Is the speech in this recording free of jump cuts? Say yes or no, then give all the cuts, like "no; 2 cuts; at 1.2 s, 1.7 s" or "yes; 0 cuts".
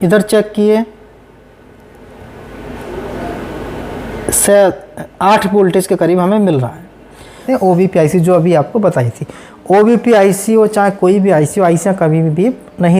no; 1 cut; at 7.4 s